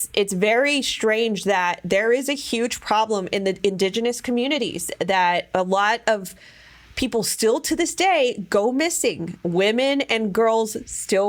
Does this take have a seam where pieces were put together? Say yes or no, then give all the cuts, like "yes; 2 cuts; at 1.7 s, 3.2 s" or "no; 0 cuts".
no; 0 cuts